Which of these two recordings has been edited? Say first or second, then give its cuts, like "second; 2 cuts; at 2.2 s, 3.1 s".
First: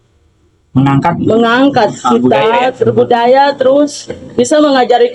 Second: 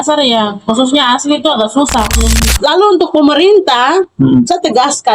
second; 1 cut; at 2.4 s